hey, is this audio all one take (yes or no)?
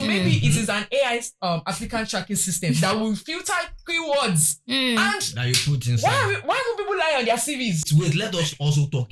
no